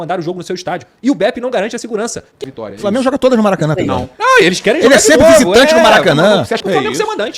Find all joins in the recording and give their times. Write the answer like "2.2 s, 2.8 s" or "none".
2.4 s, 6.6 s

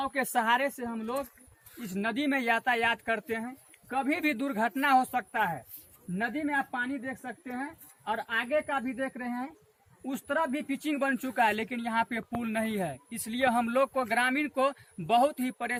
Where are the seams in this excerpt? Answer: none

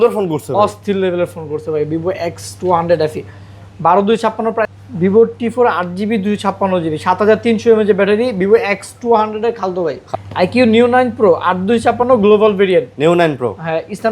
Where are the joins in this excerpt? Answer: 4.7 s, 10.0 s

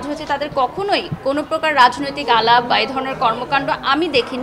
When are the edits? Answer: none

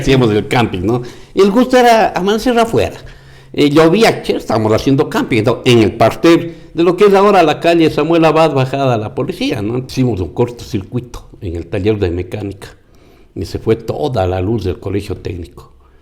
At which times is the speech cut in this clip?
9.8 s

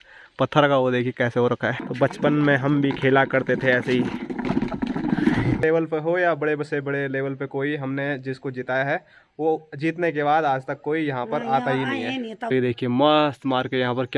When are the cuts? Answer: 1.8 s, 5.6 s, 12.4 s

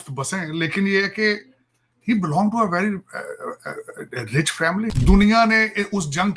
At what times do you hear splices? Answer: 4.9 s

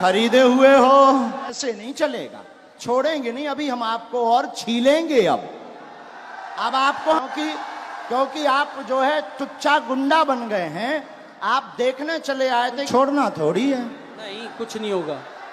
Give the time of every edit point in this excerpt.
1.6 s, 7.2 s, 12.9 s

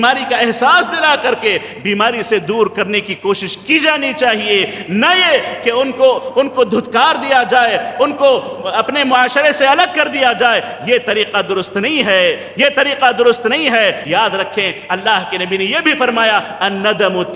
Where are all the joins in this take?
14.0 s

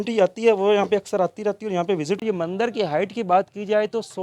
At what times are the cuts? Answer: 2.2 s

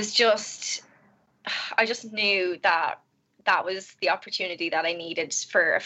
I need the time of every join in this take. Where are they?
none

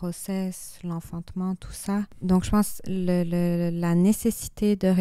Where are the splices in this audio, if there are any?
2.1 s

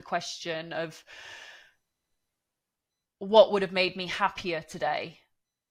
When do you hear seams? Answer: none

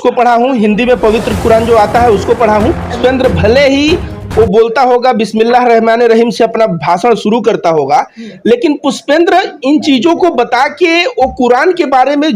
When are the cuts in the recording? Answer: 3.0 s

